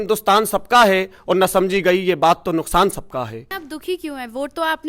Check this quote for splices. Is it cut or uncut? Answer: cut